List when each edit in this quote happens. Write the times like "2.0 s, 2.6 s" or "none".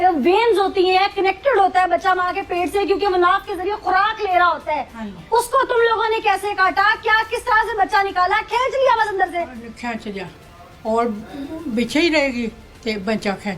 none